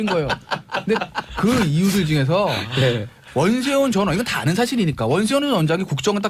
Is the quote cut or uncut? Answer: uncut